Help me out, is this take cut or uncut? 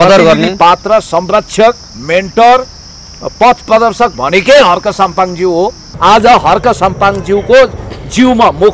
cut